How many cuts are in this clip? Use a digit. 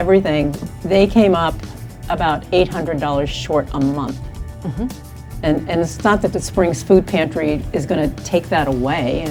0